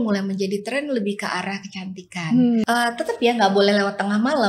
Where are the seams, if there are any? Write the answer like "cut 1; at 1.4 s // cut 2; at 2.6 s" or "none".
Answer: cut 1; at 2.6 s

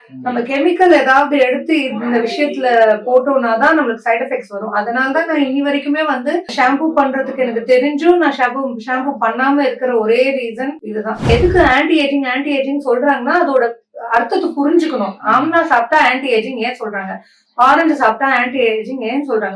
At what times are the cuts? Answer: cut 1; at 6.5 s // cut 2; at 11.3 s

